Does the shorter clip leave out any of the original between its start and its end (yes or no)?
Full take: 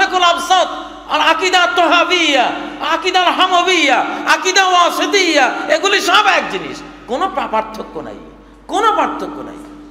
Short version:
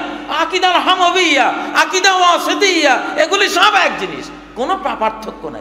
no